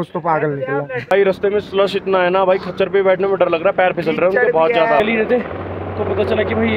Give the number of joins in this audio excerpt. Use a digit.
2